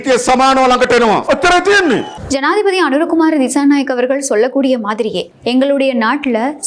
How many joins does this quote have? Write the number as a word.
one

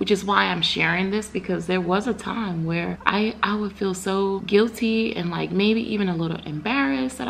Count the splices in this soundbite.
two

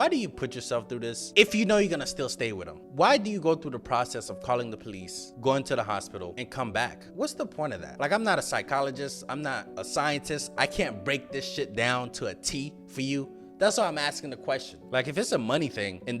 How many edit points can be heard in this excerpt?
one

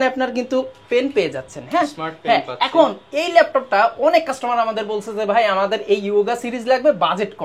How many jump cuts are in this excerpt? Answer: zero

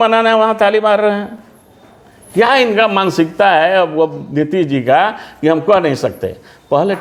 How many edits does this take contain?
zero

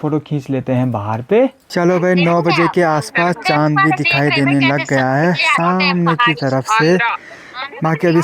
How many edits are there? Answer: zero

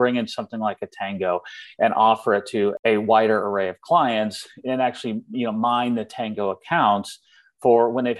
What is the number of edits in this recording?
one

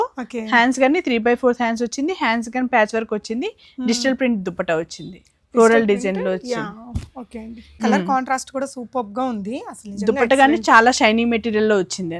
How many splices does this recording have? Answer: one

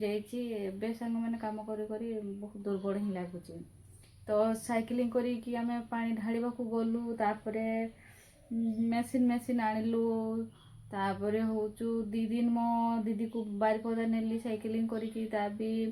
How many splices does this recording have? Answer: zero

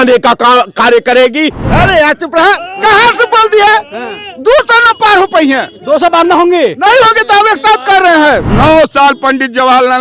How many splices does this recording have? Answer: two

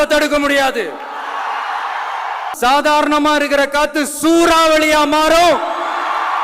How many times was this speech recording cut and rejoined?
one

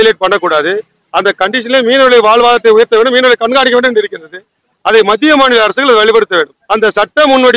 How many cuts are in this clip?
one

